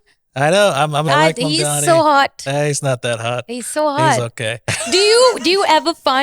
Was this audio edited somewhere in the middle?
yes; 2 cuts; at 1.1 s, 4.7 s

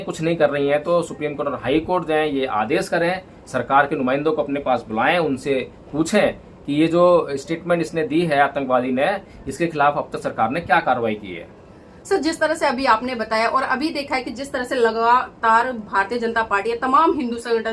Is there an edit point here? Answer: no; 0 cuts

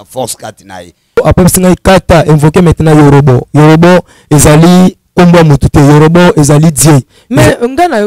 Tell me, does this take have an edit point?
yes; 1 cut; at 1.2 s

